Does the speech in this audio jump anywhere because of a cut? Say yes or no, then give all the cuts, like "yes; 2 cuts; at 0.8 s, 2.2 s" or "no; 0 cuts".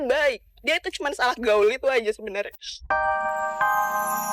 yes; 1 cut; at 2.9 s